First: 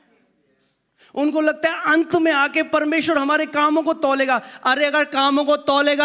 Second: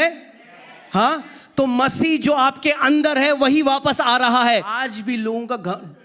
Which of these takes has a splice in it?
second; 1 cut; at 4.8 s

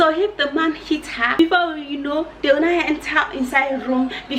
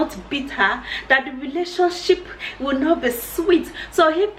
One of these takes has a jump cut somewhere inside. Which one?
first; 1 cut; at 1.4 s

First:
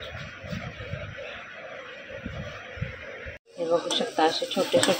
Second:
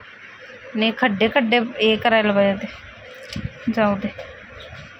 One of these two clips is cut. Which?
first; 1 cut; at 3.5 s

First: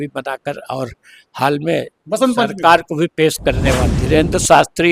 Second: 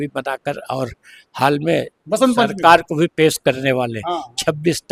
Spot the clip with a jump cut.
first; 1 cut; at 3.9 s

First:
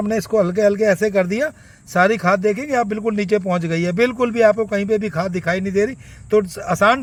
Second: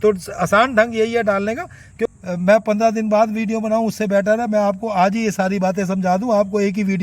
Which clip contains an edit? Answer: second; 1 cut; at 2.2 s

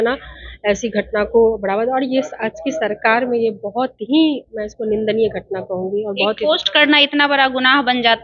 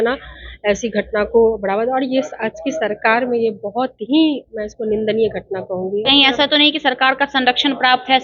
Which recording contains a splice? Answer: second; 1 cut; at 6.0 s

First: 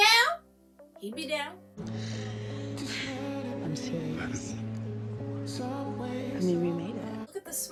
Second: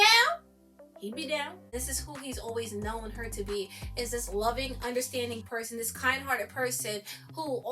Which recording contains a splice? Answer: second; 1 cut; at 1.7 s

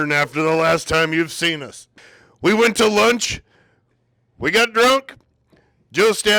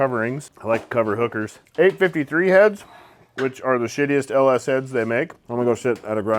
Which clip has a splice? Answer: second; 2 cuts; at 1.6 s, 5.4 s

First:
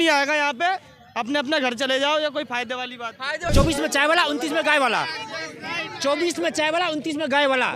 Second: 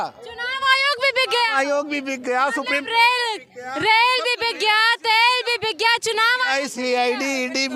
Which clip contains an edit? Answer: first; 1 cut; at 3.5 s

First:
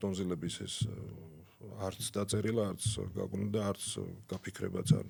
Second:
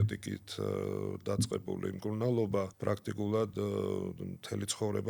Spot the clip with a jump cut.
second; 1 cut; at 2.7 s

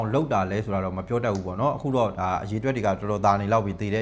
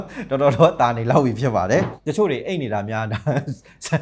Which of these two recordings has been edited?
second; 1 cut; at 1.9 s

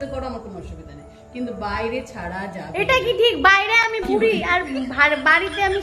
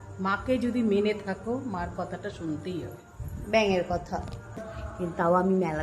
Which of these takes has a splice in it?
second; 1 cut; at 4.8 s

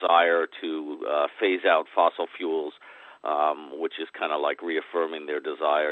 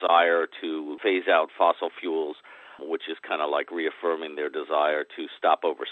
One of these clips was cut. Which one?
second; 2 cuts; at 1.0 s, 2.8 s

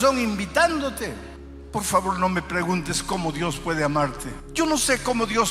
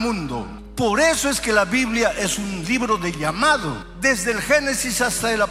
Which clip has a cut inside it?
first; 1 cut; at 1.6 s

